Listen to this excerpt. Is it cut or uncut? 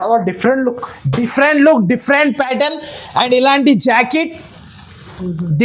uncut